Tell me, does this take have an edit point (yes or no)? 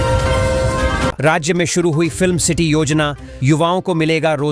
no